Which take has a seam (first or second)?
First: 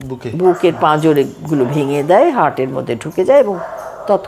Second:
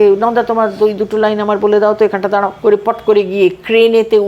second